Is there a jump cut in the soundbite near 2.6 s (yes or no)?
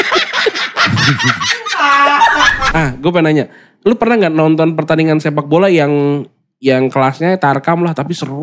yes